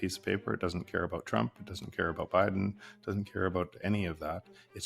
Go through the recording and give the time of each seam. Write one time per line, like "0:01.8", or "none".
none